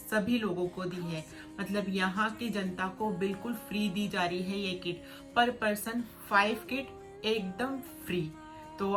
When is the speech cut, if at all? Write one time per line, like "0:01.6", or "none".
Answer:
none